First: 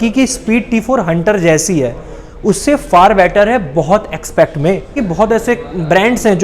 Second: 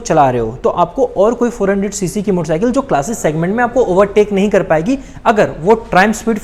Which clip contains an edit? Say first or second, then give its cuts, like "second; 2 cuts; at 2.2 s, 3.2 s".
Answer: first; 1 cut; at 4.9 s